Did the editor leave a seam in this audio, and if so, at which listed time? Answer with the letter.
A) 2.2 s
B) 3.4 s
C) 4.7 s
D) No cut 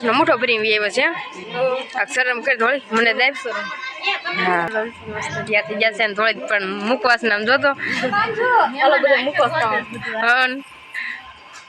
C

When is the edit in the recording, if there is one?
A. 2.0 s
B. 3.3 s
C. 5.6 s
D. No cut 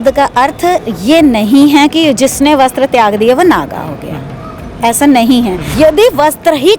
C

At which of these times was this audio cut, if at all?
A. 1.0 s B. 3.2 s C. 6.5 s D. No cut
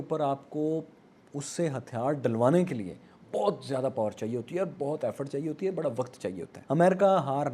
C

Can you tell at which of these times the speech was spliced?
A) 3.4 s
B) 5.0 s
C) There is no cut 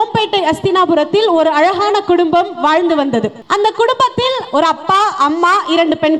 A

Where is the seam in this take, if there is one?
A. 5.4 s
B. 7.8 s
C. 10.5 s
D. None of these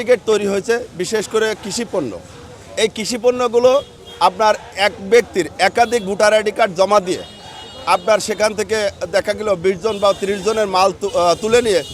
D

